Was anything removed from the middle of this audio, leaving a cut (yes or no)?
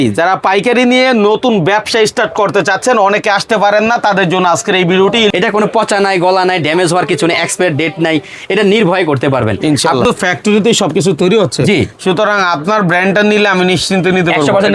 yes